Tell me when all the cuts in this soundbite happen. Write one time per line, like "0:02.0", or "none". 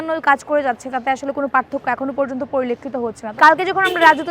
0:03.2